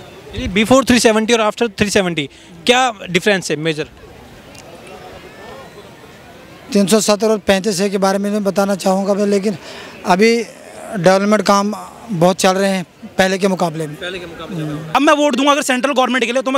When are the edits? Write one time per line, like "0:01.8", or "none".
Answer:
0:14.9